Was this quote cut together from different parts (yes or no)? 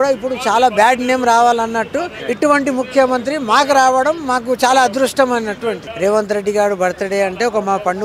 yes